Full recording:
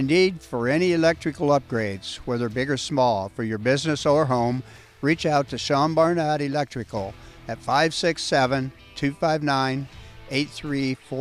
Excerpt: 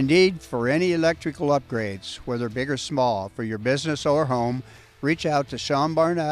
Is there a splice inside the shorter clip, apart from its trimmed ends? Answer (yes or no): no